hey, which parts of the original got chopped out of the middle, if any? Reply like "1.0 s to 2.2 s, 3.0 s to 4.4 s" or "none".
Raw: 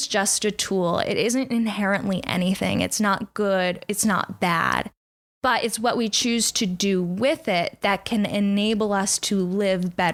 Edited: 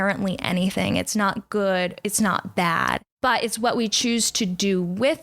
4.9 s to 5.3 s